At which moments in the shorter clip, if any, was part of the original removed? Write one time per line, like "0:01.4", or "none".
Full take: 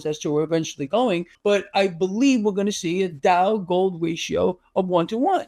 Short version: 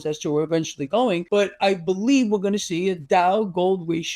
0:01.2